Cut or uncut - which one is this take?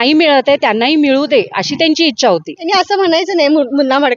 cut